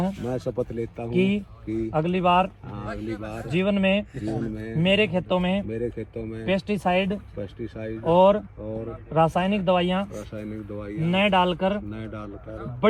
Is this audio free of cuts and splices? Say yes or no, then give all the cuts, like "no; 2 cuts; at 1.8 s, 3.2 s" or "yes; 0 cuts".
yes; 0 cuts